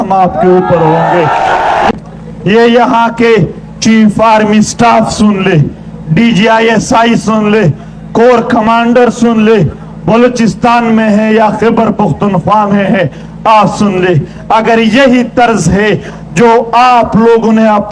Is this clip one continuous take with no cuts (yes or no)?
no